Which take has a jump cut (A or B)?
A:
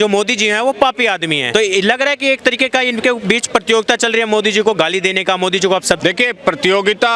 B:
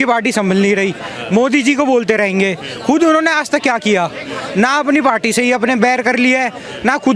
A